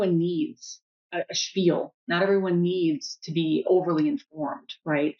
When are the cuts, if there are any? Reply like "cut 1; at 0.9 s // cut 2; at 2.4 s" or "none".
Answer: cut 1; at 1.1 s